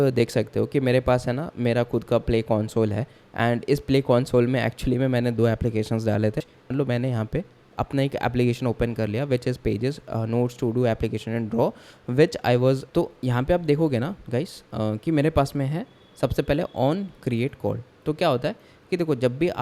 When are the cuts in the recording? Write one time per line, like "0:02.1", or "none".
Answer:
0:06.6
0:12.8